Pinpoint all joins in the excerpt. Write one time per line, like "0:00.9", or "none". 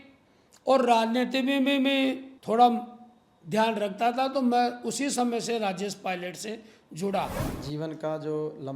0:02.3
0:07.5